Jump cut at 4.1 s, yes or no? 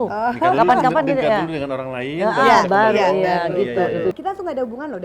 yes